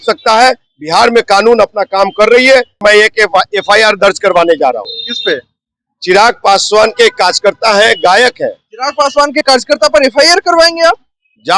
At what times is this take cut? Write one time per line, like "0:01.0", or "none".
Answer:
0:02.8